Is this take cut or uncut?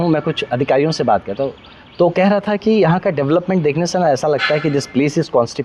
uncut